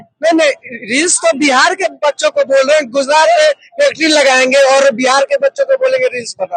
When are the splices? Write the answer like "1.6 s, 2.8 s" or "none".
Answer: none